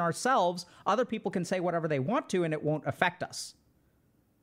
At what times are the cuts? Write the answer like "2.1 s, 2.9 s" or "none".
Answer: none